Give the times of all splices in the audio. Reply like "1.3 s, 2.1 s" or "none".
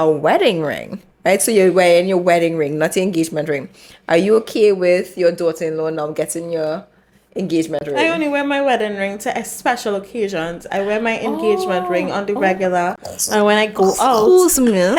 none